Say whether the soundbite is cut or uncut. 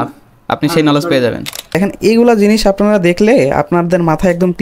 cut